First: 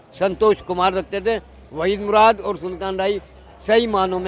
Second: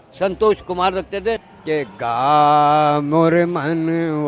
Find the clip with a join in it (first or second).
second